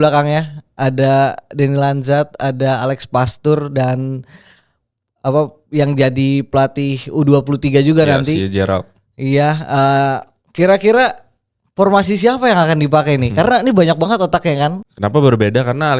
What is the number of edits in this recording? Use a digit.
1